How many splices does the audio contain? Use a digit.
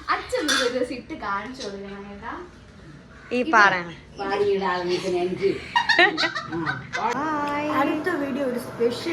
1